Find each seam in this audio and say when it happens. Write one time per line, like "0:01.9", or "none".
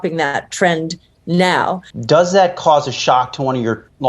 0:01.9